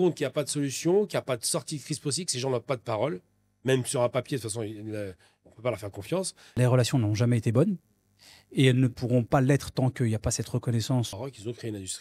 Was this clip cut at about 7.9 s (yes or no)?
no